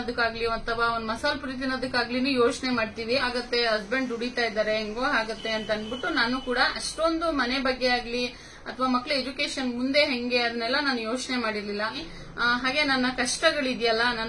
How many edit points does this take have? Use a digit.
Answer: 2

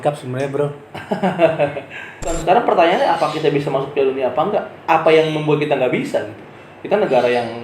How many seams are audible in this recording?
1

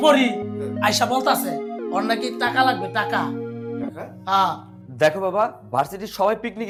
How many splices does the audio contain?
0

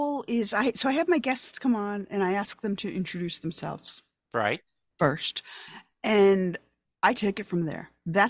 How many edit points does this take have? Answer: 0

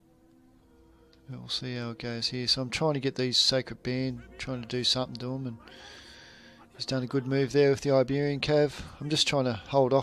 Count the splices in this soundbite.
1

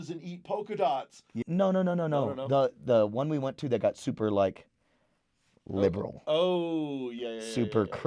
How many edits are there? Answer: 1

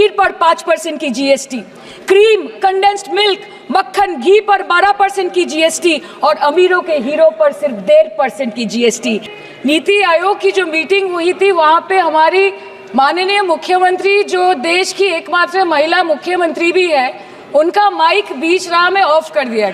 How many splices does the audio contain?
1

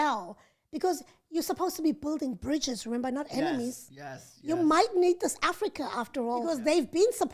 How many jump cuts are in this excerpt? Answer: 0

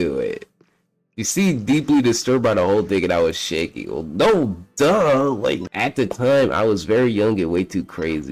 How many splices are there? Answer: 1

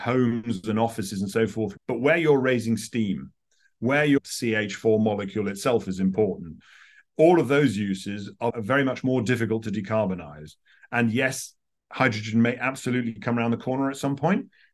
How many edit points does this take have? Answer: 2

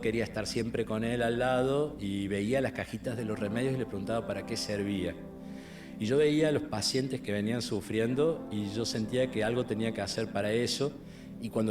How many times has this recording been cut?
1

